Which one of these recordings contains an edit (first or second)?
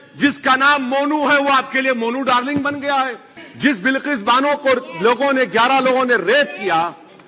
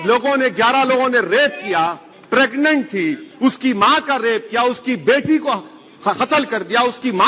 first